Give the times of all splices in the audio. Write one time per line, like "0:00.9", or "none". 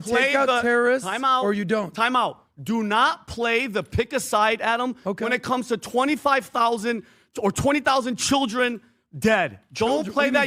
none